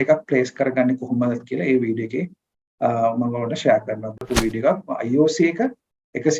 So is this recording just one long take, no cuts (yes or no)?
no